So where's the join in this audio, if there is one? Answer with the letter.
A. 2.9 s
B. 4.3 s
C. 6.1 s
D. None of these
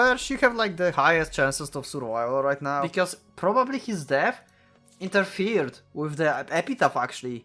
A